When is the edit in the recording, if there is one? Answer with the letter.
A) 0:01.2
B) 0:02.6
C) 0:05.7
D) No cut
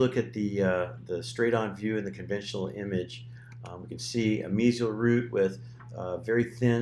A